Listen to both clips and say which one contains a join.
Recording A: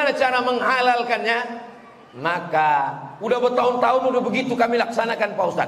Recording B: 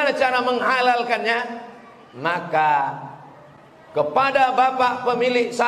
A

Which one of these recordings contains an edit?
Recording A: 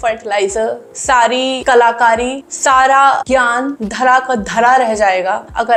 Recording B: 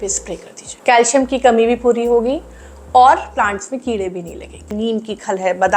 B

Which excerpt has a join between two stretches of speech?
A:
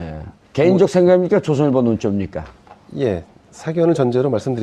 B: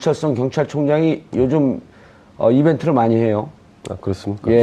B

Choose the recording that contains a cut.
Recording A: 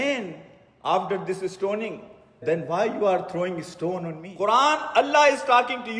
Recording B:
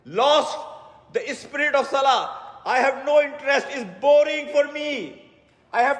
A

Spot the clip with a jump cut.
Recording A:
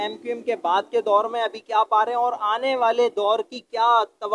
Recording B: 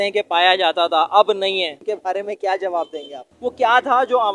B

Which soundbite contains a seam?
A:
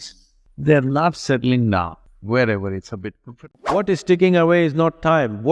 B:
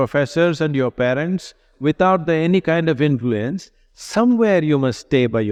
A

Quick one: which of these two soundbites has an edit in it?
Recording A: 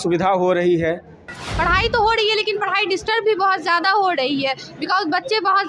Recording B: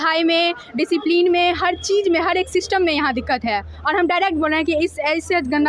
A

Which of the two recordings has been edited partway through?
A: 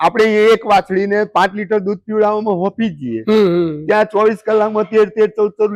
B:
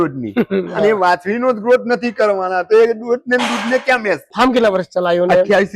B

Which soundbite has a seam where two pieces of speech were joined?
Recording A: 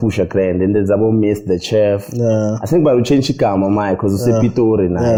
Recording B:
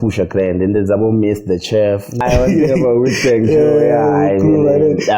B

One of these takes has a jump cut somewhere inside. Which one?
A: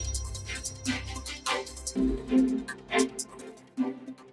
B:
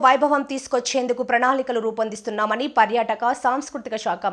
A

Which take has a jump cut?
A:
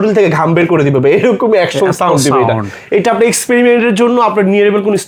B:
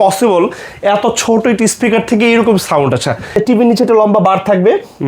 B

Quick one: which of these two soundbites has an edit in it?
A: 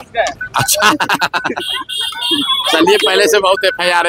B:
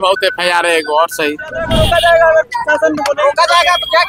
B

